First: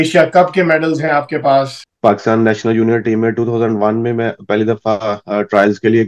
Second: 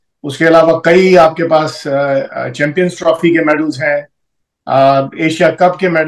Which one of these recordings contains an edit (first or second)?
first